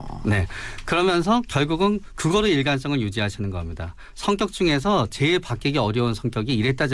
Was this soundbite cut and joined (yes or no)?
no